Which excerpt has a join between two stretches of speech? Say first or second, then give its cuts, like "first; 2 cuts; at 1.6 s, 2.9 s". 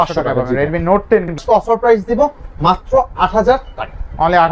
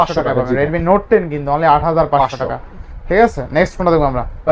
first; 1 cut; at 1.4 s